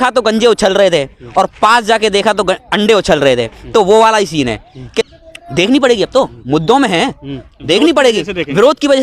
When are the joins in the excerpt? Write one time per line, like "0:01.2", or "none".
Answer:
0:05.0